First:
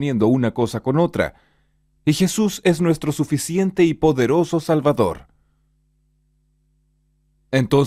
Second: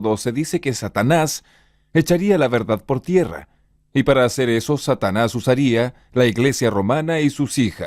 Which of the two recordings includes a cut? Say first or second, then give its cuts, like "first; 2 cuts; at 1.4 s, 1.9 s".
second; 1 cut; at 3.9 s